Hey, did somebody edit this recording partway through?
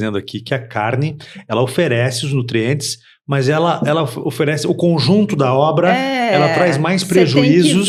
no; 0 cuts

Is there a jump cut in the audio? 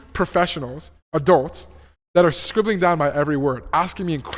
no; 0 cuts

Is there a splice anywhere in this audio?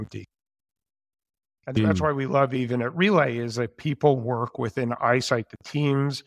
yes; 1 cut; at 2.5 s

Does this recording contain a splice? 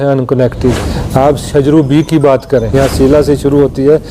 yes; 2 cuts; at 0.9 s, 2.7 s

